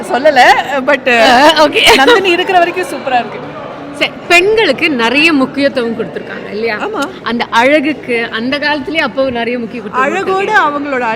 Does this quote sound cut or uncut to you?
uncut